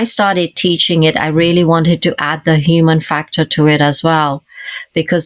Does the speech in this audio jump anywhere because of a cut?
no; 0 cuts

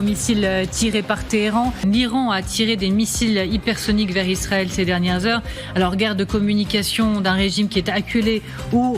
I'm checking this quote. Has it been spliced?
yes; 1 cut; at 1.8 s

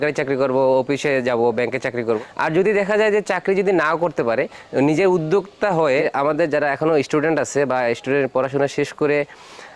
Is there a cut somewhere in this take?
yes; 2 cuts; at 2.1 s, 6.1 s

